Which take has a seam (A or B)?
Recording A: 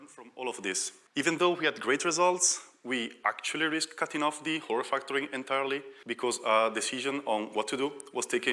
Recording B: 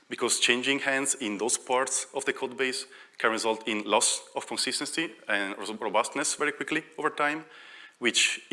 A